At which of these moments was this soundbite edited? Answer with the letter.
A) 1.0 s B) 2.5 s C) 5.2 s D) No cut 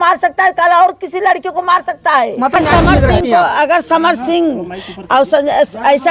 B